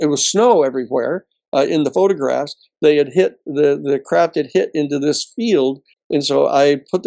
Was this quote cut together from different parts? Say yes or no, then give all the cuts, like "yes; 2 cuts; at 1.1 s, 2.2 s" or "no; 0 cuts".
yes; 1 cut; at 5.9 s